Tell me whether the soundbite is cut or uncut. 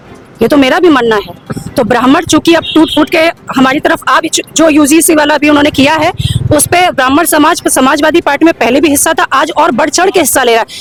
uncut